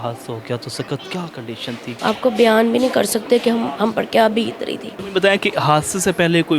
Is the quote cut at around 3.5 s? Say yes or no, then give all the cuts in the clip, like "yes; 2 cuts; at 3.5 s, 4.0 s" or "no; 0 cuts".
no; 2 cuts; at 1.9 s, 5.0 s